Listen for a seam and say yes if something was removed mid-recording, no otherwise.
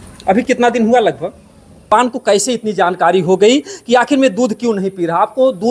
yes